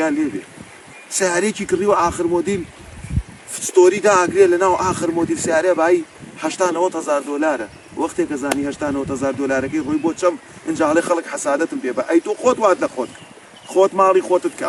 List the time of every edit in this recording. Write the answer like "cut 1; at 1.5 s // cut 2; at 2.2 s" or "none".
none